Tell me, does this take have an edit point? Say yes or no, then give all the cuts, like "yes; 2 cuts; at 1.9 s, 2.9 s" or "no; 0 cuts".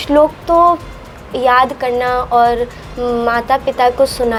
no; 0 cuts